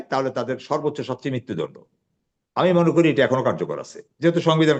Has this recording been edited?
no; 0 cuts

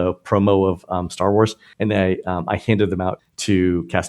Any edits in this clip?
yes; 1 cut; at 1.7 s

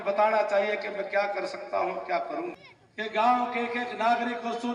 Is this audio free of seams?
no; 1 cut; at 2.5 s

